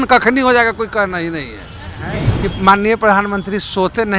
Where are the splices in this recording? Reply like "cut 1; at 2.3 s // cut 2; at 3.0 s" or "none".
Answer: cut 1; at 2.0 s